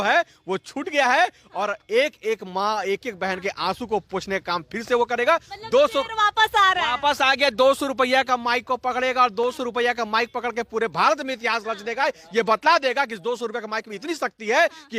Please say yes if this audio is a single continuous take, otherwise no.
yes